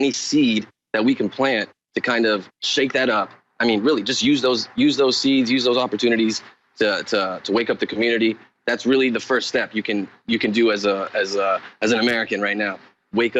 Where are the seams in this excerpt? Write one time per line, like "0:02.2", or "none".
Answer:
none